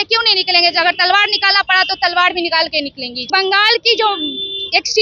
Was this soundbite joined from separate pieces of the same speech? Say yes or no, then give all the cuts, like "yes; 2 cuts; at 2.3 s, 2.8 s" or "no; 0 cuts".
yes; 1 cut; at 3.2 s